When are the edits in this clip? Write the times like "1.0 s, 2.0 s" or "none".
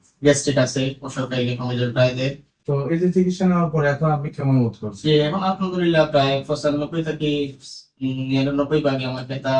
2.5 s